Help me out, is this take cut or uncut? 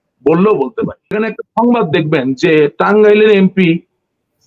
cut